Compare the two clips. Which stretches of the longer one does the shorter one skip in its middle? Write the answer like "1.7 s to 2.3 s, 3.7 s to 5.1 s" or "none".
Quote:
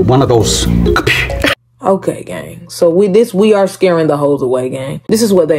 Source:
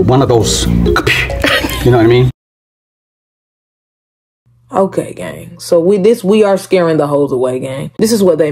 1.5 s to 4.5 s